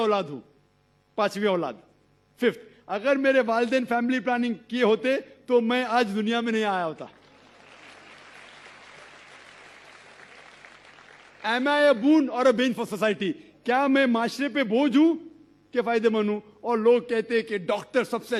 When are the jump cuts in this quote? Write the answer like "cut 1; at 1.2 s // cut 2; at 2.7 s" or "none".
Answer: none